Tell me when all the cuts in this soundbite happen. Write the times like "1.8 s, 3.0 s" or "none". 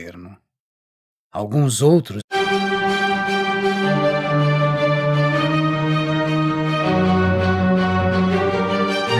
none